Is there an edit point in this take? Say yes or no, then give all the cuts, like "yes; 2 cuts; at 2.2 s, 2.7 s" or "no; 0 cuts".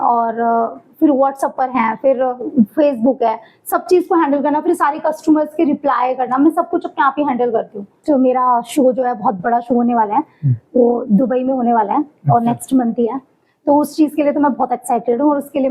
yes; 1 cut; at 8.0 s